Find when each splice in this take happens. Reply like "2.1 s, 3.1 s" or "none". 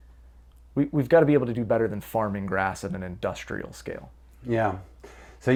none